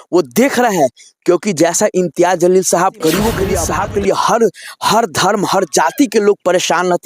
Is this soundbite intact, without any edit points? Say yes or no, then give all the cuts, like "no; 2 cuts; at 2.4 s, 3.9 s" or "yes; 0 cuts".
no; 1 cut; at 3.6 s